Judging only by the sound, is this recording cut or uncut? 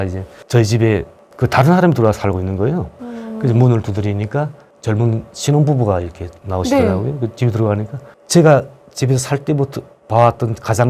cut